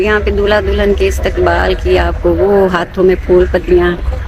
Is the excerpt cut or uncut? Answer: uncut